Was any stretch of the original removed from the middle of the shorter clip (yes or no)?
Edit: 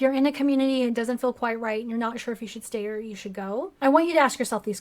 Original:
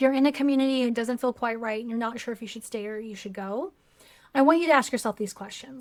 yes